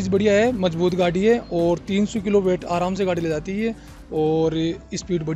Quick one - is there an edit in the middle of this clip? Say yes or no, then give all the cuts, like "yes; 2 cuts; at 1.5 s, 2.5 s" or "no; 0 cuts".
no; 0 cuts